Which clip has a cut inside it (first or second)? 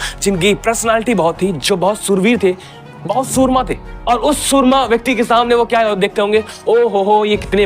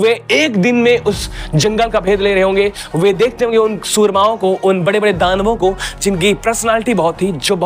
first